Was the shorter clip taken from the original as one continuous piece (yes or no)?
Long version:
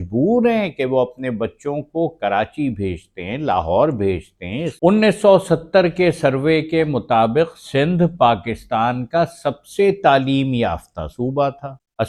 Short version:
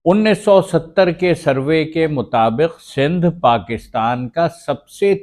yes